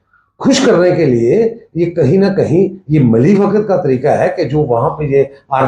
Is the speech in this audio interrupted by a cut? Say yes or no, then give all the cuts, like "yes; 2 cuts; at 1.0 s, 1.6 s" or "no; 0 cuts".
no; 0 cuts